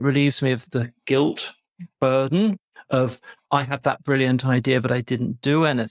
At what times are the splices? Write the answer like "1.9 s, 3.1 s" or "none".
none

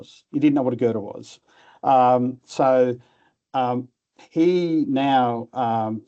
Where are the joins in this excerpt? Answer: none

